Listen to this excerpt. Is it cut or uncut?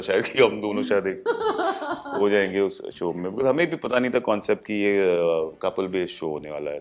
uncut